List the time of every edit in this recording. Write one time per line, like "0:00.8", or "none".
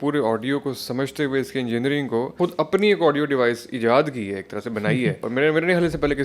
0:02.3
0:05.2